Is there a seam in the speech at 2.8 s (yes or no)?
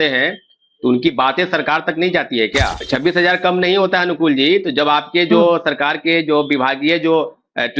yes